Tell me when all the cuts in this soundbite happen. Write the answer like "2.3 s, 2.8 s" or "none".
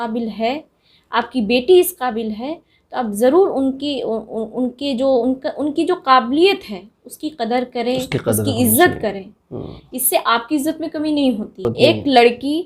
11.6 s